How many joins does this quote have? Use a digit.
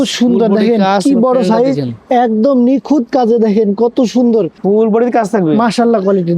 1